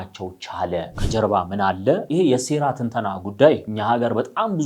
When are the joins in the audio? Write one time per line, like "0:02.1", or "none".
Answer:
0:01.0
0:02.0
0:03.7